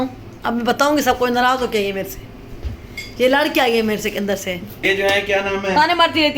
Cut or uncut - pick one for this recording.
cut